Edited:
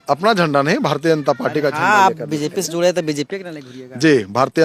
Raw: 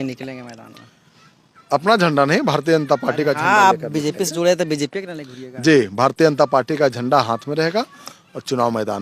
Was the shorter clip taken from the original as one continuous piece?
yes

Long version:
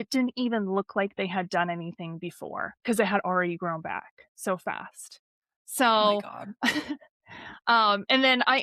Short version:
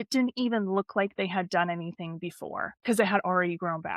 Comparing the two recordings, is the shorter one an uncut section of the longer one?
yes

